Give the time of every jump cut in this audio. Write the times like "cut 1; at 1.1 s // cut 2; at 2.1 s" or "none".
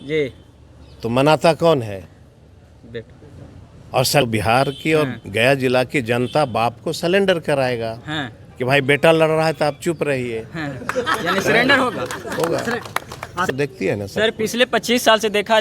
cut 1; at 4.2 s // cut 2; at 13.5 s